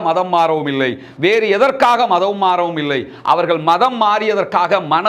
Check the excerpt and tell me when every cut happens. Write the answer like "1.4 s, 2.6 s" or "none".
none